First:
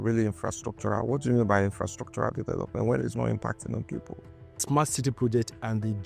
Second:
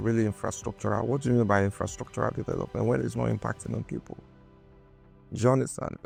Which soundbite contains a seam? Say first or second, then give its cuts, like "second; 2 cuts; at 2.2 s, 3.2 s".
first; 1 cut; at 4.6 s